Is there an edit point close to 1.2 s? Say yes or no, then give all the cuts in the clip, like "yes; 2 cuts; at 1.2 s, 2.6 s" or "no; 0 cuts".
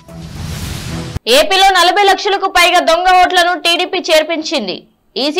yes; 1 cut; at 1.2 s